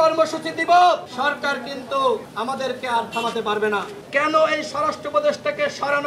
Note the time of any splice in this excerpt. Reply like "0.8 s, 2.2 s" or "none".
1.1 s, 2.3 s, 3.9 s